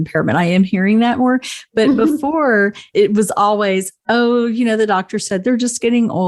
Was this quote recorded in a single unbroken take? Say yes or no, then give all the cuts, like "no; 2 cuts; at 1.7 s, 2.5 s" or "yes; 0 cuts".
no; 1 cut; at 2.8 s